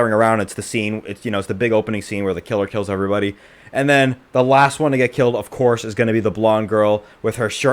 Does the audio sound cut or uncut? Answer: uncut